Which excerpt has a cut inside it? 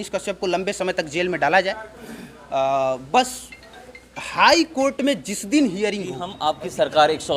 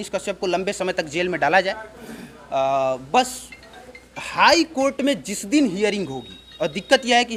first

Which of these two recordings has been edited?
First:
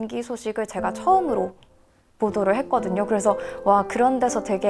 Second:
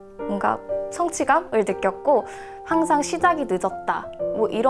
second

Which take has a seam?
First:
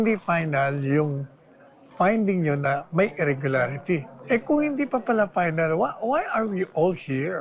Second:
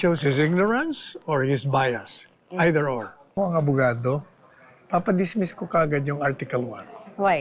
second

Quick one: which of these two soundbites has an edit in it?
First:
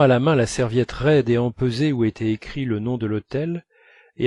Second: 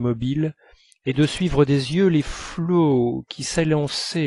first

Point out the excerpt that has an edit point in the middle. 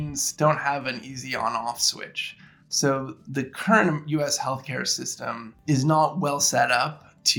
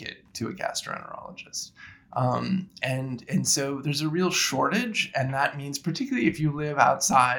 first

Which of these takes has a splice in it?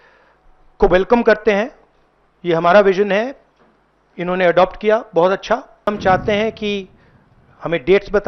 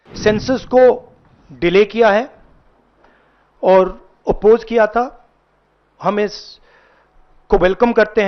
first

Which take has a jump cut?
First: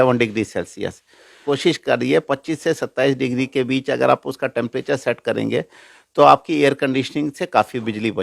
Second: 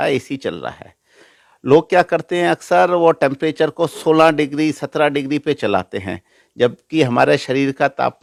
first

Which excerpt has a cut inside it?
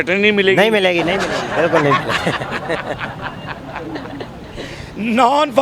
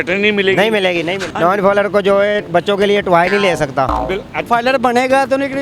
second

